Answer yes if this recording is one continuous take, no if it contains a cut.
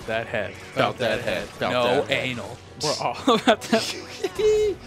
yes